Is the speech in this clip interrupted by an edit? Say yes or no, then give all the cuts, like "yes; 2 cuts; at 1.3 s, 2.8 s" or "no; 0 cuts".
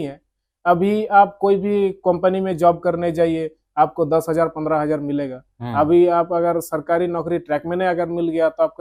no; 0 cuts